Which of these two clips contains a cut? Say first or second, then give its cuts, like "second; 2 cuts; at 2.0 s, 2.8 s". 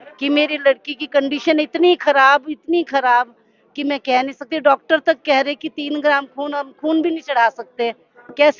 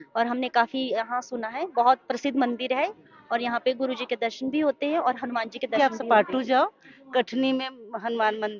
second; 1 cut; at 5.8 s